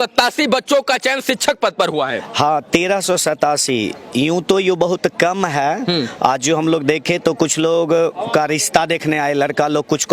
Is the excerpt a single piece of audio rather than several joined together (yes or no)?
yes